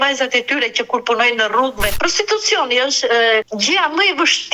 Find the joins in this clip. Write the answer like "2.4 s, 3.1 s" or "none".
1.9 s, 3.5 s